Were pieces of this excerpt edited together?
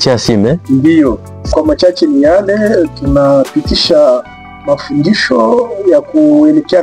yes; 1 cut; at 1.5 s

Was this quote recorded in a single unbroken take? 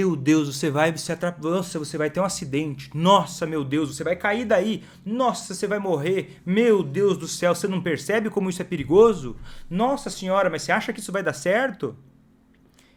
yes; 0 cuts

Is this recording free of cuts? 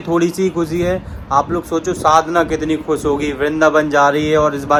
yes; 0 cuts

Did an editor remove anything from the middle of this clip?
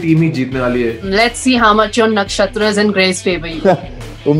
yes; 2 cuts; at 1.1 s, 3.5 s

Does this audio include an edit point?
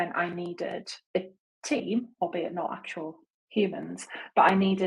yes; 1 cut; at 0.9 s

